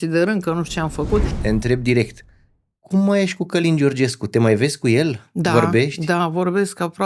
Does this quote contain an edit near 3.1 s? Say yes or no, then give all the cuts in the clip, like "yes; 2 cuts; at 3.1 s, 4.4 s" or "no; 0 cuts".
no; 1 cut; at 1.3 s